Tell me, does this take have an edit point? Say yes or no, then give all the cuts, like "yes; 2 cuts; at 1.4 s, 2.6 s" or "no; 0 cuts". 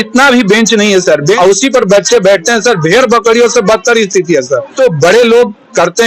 yes; 2 cuts; at 1.4 s, 4.7 s